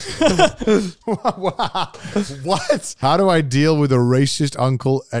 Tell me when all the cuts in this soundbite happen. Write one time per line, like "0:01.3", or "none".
0:01.0
0:02.9